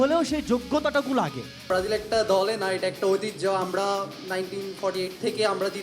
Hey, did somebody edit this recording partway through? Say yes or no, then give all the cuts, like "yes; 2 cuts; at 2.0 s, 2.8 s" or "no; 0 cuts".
yes; 1 cut; at 1.7 s